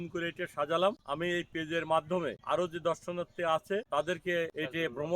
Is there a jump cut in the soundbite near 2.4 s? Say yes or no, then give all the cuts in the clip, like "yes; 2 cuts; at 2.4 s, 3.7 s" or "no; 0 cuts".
yes; 3 cuts; at 1.1 s, 2.4 s, 4.2 s